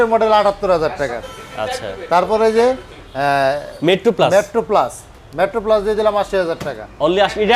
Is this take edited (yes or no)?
no